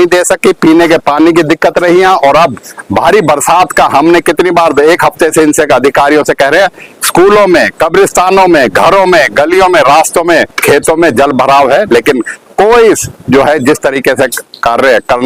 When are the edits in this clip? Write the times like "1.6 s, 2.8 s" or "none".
none